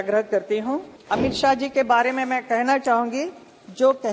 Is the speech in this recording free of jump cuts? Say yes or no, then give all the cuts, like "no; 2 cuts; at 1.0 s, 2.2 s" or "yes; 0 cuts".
no; 1 cut; at 0.9 s